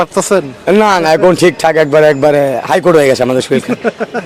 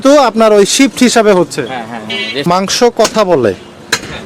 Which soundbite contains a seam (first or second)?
second